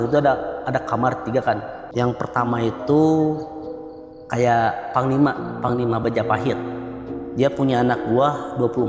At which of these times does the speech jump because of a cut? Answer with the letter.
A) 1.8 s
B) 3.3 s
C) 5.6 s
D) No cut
A